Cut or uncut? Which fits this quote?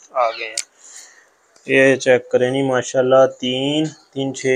uncut